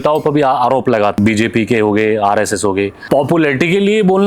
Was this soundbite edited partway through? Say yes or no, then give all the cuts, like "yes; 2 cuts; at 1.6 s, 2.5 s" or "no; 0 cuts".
yes; 2 cuts; at 1.2 s, 3.0 s